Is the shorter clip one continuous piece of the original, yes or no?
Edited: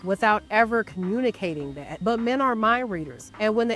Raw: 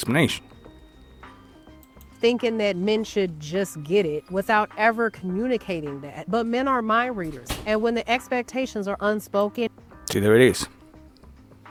yes